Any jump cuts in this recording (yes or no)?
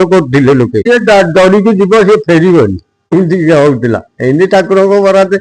yes